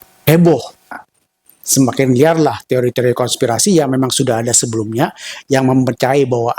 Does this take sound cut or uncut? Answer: cut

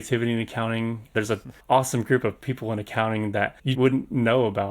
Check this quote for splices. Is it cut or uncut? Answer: cut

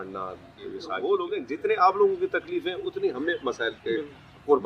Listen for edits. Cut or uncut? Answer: cut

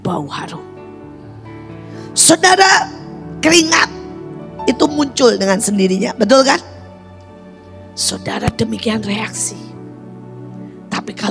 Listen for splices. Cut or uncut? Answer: uncut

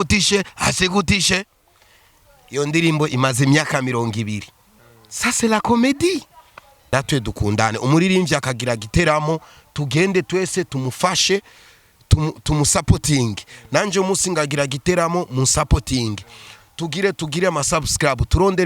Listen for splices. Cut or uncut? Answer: cut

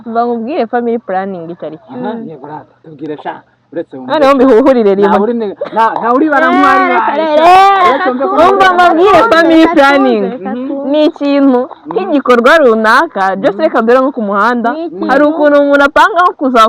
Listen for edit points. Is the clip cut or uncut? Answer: uncut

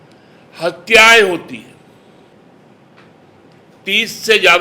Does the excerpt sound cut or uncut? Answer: cut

